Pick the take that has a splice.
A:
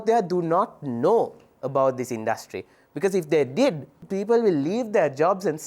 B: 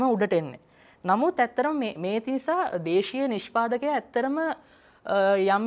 A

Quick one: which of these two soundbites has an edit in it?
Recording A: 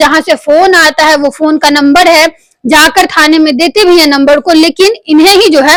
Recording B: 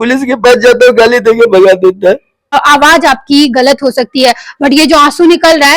B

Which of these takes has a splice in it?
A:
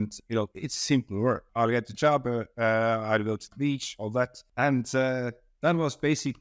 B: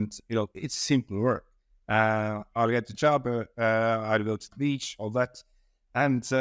A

